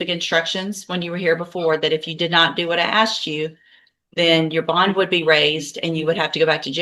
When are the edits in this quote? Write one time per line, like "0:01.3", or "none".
none